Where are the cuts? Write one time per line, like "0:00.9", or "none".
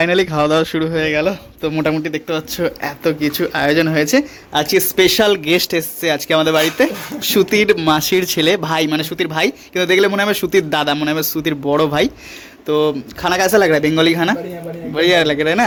none

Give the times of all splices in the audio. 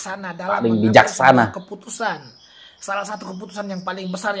none

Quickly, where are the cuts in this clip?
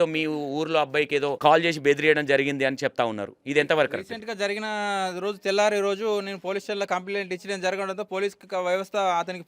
0:01.4

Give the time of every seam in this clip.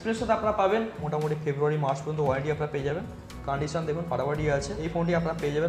0:01.0
0:04.8

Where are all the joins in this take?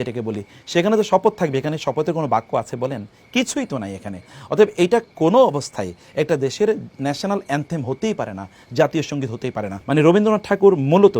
0:09.7

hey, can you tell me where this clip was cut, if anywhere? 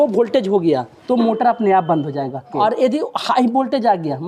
0:01.0
0:02.5

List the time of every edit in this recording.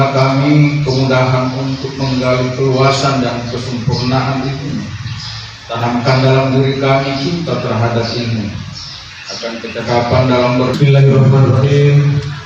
0:10.8

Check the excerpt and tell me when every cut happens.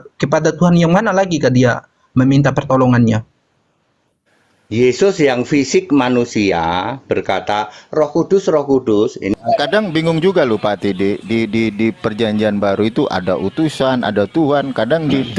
0:09.4

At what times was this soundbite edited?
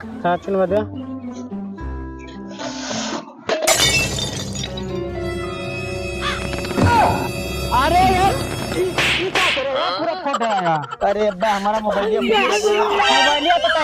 none

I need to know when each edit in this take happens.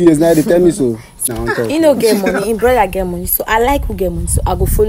0:01.3

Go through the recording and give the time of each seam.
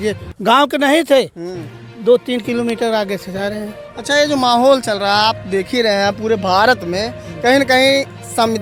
none

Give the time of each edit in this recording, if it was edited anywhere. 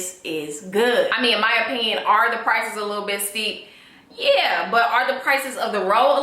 0:01.2

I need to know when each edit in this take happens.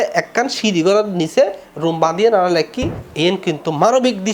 0:03.0

